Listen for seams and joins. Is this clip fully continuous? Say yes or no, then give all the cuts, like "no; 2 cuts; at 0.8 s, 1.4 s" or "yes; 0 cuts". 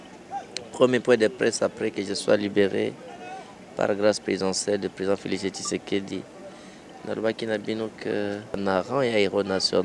no; 1 cut; at 8.6 s